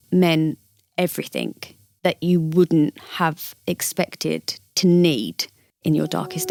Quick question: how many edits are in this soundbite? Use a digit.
0